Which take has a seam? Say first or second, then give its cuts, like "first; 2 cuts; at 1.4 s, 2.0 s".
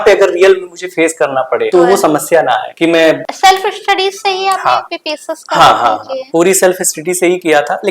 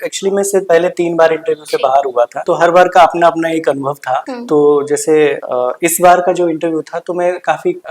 first; 1 cut; at 3.2 s